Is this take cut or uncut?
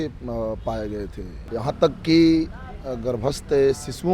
cut